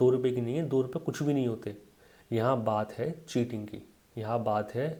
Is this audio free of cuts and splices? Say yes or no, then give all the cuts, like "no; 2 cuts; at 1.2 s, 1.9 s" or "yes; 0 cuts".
yes; 0 cuts